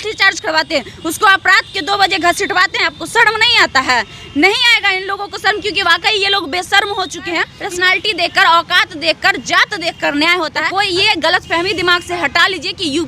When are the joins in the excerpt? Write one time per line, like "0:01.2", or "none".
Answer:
0:07.5
0:10.7